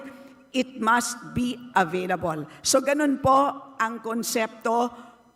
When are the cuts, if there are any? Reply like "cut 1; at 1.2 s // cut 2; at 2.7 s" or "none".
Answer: none